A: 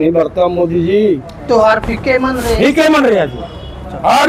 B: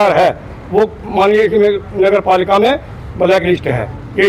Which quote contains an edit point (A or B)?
A